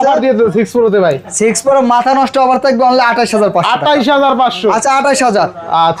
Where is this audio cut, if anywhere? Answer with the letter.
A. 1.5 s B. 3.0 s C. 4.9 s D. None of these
D